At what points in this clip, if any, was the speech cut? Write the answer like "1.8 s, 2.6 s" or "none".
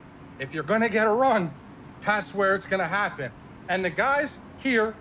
none